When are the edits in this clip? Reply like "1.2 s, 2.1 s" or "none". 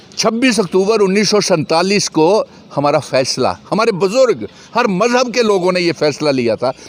none